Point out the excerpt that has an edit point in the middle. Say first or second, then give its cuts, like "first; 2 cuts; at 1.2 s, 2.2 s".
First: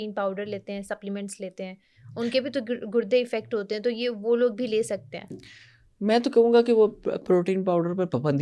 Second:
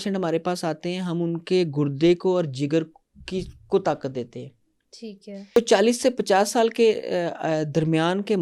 second; 1 cut; at 5.6 s